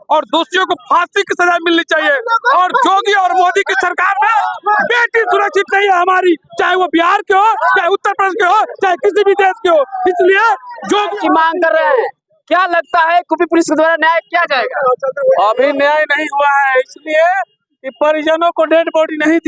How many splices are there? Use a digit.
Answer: 1